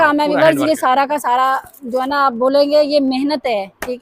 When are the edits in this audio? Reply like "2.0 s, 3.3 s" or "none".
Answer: none

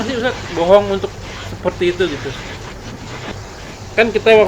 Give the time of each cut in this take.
3.3 s

